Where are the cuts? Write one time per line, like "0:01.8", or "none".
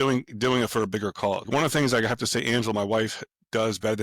0:01.5